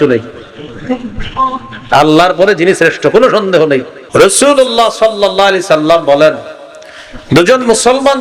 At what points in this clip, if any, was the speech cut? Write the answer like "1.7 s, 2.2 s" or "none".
4.0 s

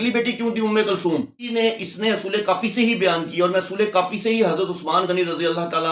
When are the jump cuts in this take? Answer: 1.5 s

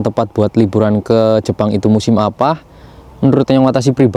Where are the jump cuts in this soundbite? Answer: none

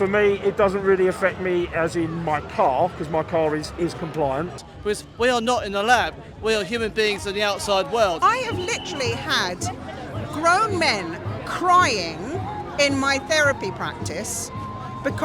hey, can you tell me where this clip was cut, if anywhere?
4.6 s, 8.2 s

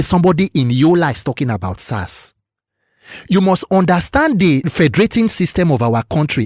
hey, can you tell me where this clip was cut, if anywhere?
4.6 s

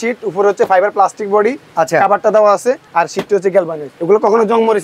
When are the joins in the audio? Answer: 2.8 s, 3.9 s

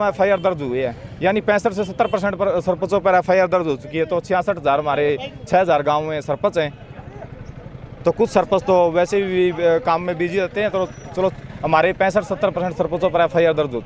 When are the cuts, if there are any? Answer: none

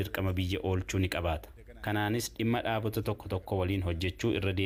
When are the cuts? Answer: none

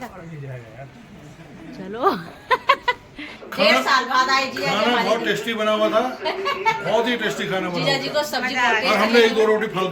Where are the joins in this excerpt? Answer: 3.3 s

